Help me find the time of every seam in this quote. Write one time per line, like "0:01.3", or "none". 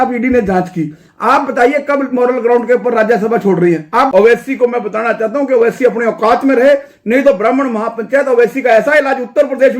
0:04.1